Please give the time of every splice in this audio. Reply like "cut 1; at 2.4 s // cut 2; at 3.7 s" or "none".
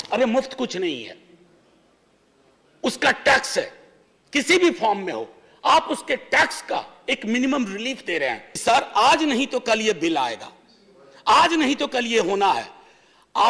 cut 1; at 8.5 s